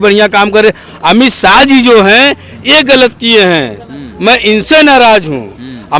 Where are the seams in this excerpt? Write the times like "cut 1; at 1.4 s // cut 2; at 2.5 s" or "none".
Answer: none

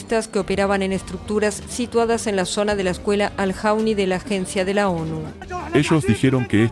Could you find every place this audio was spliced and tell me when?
cut 1; at 5.4 s

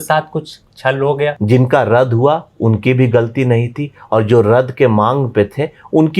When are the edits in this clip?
cut 1; at 1.4 s

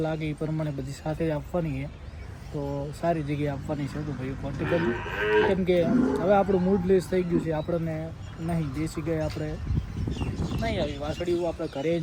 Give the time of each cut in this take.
none

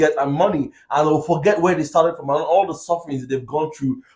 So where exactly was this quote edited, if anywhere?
none

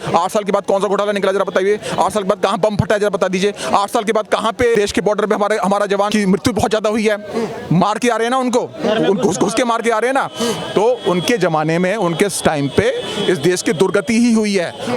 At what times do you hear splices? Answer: cut 1; at 4.7 s // cut 2; at 6.1 s

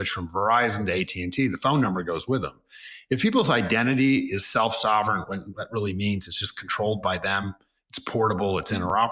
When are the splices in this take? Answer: none

